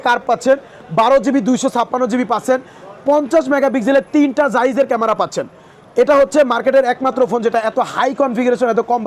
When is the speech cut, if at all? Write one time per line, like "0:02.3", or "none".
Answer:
none